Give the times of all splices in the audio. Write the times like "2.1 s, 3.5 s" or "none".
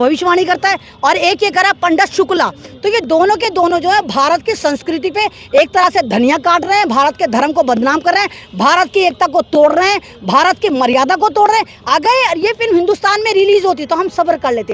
none